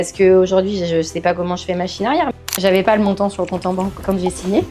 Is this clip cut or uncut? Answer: cut